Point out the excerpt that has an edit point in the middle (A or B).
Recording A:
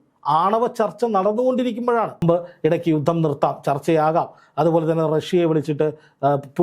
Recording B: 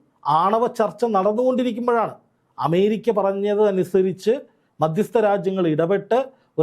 A